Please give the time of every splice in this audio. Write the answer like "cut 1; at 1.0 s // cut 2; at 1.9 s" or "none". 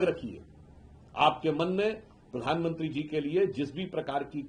none